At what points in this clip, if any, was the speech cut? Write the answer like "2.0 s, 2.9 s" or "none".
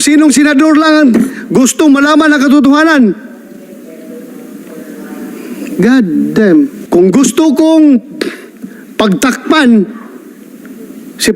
6.8 s